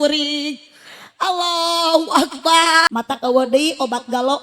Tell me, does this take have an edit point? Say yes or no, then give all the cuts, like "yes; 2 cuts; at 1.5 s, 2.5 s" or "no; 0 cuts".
yes; 1 cut; at 2.9 s